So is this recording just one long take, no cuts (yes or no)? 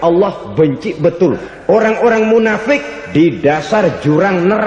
no